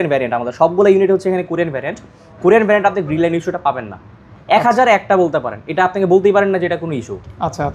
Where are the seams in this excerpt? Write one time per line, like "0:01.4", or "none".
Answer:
none